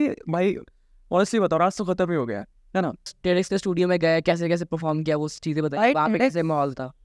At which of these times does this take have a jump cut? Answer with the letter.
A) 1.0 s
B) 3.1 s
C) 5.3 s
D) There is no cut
B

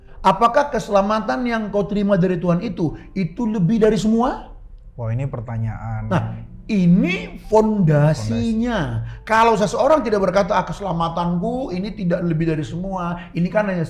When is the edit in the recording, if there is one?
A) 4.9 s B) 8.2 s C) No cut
C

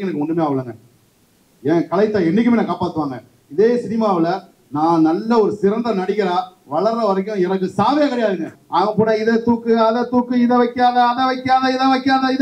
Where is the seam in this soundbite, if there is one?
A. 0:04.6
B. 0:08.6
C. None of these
B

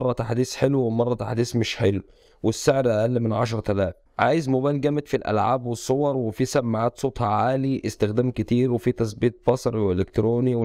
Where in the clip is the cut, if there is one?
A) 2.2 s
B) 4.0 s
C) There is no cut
B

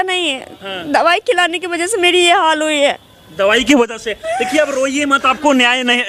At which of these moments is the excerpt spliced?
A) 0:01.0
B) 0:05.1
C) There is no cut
C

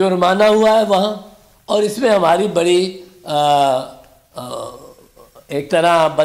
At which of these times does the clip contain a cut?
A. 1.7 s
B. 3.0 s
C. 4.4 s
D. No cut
D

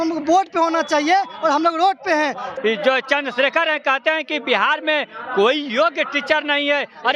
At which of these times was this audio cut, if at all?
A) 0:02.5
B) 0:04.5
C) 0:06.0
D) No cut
A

